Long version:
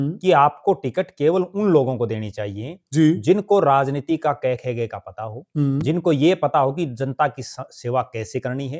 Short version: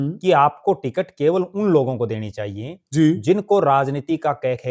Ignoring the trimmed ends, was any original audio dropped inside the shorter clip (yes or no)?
no